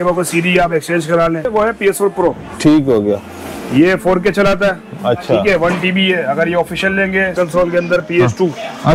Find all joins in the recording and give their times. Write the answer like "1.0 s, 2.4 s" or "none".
1.5 s, 7.3 s

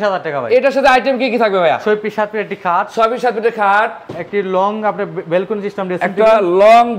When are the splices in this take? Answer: none

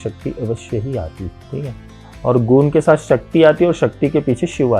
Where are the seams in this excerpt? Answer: 1.3 s

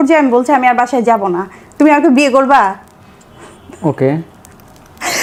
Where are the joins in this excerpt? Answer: none

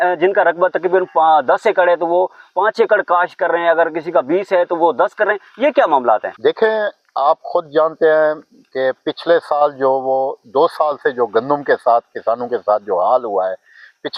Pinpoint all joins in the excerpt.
none

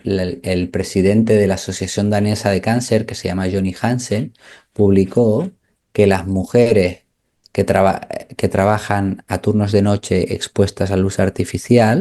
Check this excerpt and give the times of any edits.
none

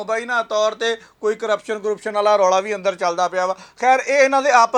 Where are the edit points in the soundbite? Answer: none

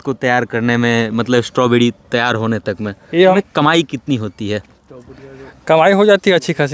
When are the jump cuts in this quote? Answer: 3.4 s

